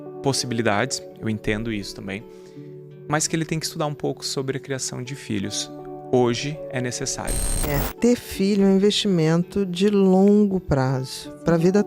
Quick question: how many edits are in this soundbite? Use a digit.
1